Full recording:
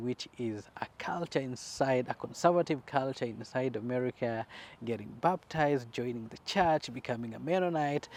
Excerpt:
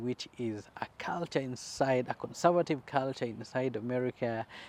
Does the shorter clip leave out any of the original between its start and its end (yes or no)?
no